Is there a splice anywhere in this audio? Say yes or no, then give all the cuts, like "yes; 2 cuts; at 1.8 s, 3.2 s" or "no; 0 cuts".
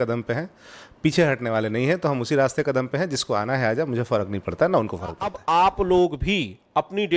yes; 1 cut; at 5.4 s